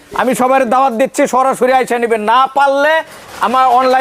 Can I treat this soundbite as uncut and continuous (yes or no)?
yes